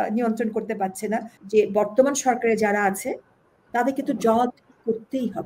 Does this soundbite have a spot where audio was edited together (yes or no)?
yes